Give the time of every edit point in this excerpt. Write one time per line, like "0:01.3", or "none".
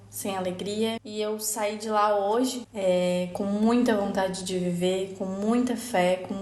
0:02.6